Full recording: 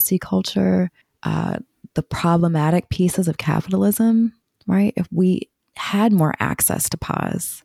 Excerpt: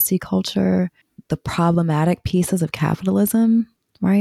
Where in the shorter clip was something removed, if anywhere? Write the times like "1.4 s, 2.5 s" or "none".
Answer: 1.1 s